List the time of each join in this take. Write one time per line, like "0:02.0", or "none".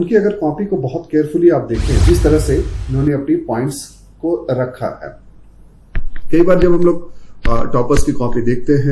0:01.9